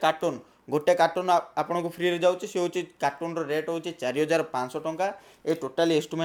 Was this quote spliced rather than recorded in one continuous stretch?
no; 0 cuts

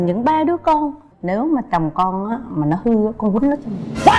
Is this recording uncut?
no; 1 cut; at 1.1 s

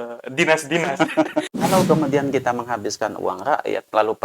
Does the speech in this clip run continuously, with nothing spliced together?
no; 1 cut; at 1.5 s

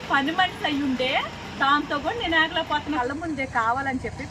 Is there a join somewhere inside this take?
yes; 1 cut; at 3.0 s

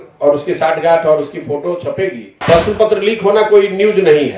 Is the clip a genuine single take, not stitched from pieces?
no; 1 cut; at 2.4 s

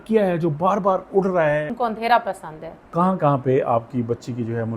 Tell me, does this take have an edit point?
yes; 2 cuts; at 1.7 s, 2.7 s

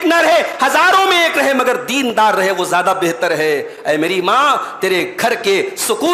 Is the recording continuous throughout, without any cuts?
yes; 0 cuts

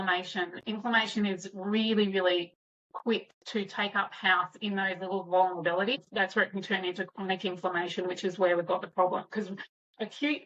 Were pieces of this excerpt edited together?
yes; 1 cut; at 6.0 s

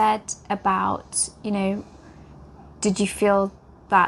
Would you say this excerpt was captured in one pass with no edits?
yes; 0 cuts

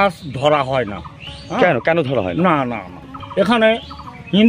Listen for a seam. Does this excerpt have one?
no; 0 cuts

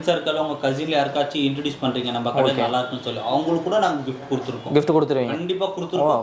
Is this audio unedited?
yes; 0 cuts

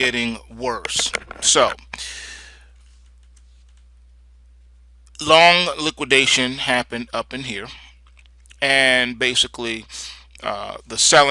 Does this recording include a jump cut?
yes; 1 cut; at 7.1 s

